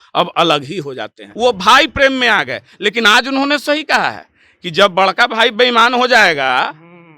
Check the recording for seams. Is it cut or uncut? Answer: cut